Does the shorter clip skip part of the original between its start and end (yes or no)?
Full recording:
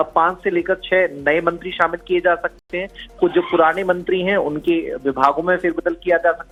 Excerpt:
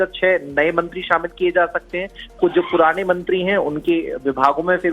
yes